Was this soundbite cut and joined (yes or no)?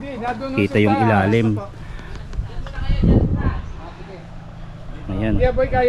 no